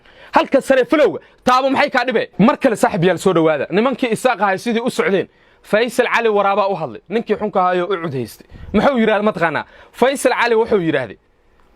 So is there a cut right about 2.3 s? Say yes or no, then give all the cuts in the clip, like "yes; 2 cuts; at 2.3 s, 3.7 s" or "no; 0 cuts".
no; 0 cuts